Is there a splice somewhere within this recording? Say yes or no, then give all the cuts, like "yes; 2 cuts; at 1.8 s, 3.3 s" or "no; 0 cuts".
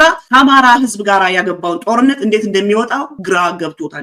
no; 0 cuts